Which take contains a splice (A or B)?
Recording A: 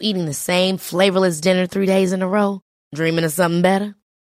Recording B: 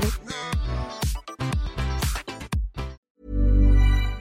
B